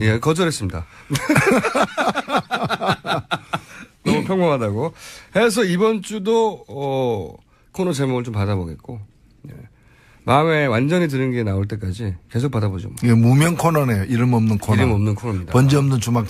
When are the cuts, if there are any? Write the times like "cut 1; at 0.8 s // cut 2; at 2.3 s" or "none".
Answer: none

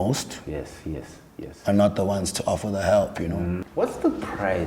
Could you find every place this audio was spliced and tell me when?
cut 1; at 3.6 s

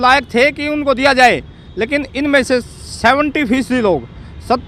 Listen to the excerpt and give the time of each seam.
none

